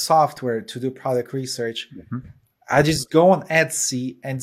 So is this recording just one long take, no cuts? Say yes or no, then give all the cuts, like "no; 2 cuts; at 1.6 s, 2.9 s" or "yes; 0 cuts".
yes; 0 cuts